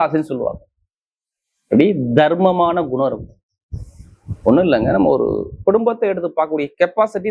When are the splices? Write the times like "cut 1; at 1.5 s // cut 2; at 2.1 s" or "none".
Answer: none

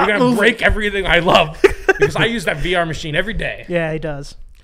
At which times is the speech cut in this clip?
none

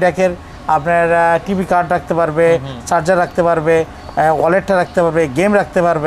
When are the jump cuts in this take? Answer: none

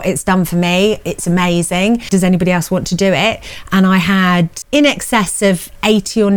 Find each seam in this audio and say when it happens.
cut 1; at 2.0 s // cut 2; at 4.6 s

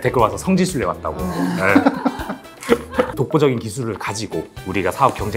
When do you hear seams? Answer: cut 1; at 3.1 s

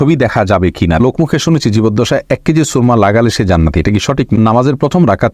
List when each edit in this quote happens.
cut 1; at 1.0 s // cut 2; at 4.3 s

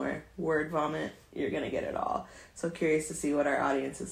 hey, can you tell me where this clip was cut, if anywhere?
none

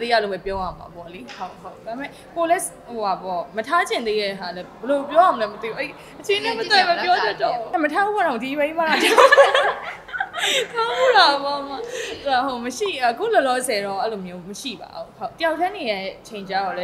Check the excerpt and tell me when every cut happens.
cut 1; at 7.6 s // cut 2; at 15.4 s

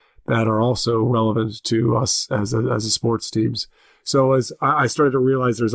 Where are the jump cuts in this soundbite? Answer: none

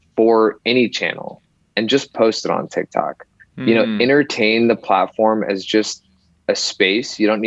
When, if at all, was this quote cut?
none

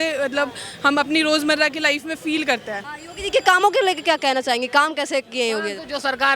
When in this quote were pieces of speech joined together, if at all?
cut 1; at 2.9 s

